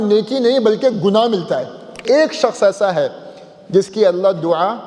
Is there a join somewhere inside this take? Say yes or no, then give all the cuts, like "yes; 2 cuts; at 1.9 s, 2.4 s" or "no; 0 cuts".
yes; 1 cut; at 2.0 s